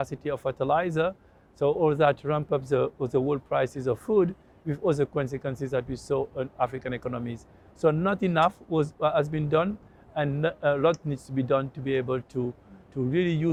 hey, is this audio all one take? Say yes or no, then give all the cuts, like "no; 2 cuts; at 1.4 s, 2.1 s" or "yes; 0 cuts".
yes; 0 cuts